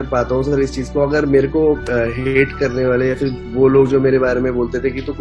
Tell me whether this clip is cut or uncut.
uncut